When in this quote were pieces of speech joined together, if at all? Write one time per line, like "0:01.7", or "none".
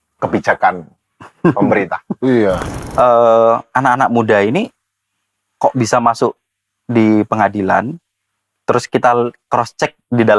0:02.7